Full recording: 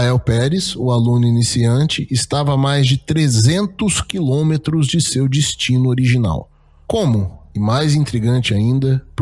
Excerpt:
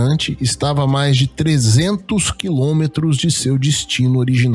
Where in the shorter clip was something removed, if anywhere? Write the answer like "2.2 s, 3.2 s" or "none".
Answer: none

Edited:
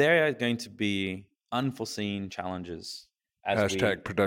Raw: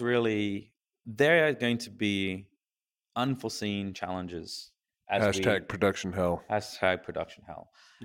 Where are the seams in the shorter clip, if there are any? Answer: 1.3 s

